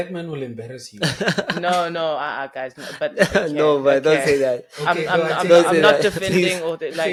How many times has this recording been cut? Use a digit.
0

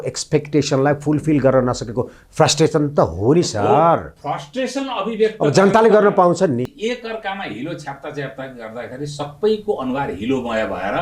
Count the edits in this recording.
1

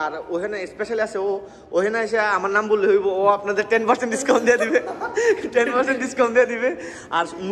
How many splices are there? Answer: 0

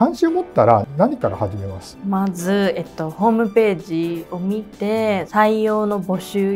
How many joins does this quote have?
0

